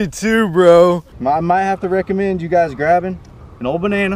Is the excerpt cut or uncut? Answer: cut